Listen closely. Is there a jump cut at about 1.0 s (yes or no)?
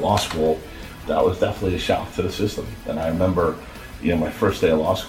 yes